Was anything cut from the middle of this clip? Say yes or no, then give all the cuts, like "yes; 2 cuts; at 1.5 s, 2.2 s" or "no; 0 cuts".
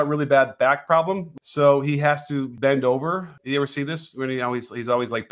yes; 3 cuts; at 1.3 s, 2.5 s, 3.3 s